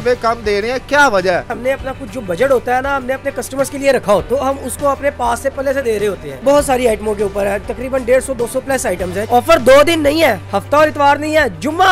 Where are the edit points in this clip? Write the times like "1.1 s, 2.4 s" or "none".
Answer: 1.5 s, 4.2 s, 6.4 s, 9.2 s